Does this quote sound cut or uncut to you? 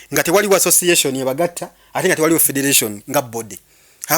uncut